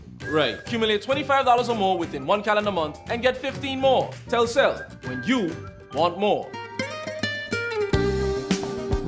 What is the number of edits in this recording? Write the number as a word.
one